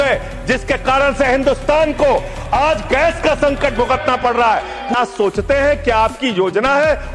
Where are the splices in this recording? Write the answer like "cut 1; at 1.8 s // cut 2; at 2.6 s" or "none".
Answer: cut 1; at 4.9 s